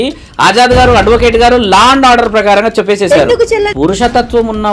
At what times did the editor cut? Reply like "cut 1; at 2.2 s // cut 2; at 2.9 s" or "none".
cut 1; at 3.7 s